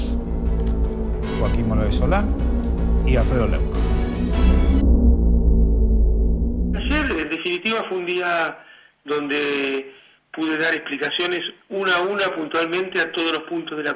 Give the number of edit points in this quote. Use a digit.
0